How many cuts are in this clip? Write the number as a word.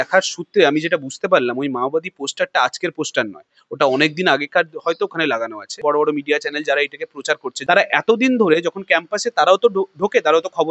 two